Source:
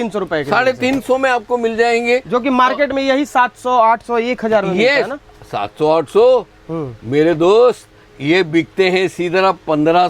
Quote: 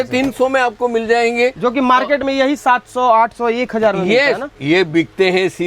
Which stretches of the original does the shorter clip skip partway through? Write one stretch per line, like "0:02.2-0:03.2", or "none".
0:05.2-0:08.1